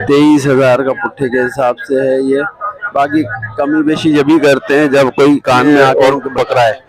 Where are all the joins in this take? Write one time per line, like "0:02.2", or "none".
0:05.9